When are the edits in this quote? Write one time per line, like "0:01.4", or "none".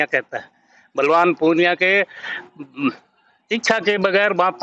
none